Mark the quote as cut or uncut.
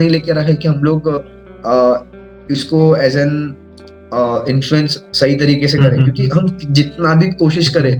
uncut